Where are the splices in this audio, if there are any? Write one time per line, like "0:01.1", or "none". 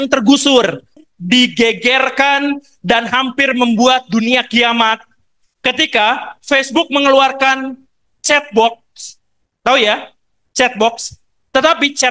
0:01.0